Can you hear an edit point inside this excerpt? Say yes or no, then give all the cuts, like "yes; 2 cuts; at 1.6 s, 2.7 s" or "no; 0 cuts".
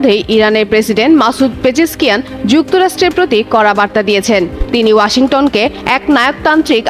yes; 1 cut; at 4.6 s